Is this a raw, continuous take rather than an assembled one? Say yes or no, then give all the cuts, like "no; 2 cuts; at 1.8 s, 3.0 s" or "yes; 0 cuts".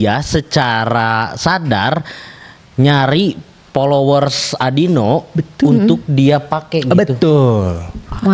yes; 0 cuts